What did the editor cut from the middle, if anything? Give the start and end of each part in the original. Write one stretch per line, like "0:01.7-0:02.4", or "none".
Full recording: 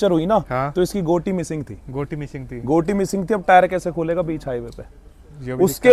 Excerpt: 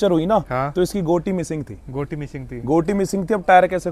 none